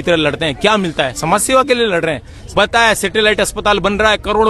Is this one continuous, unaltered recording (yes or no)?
no